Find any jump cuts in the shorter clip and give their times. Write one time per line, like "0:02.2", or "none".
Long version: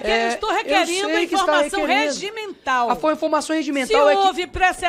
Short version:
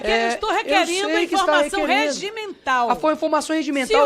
none

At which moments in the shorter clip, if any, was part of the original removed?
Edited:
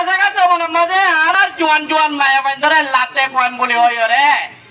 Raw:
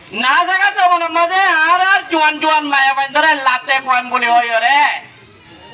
0:01.3

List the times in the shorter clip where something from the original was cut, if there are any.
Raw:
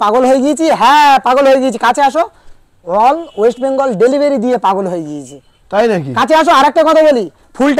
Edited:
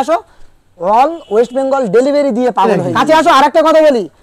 0:02.8

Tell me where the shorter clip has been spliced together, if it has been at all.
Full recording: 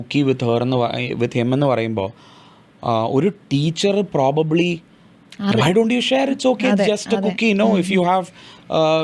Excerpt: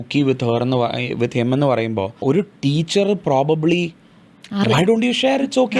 0:02.2

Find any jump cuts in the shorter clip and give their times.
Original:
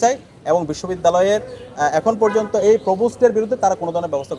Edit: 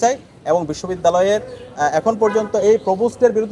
none

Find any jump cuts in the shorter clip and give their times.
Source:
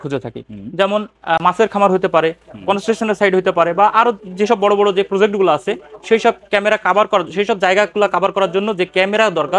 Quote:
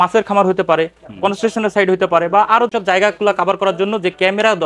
0:02.8

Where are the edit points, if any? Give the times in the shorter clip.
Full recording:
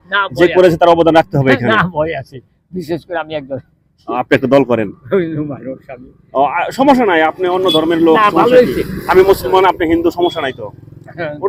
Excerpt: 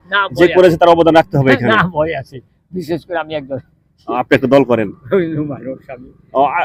none

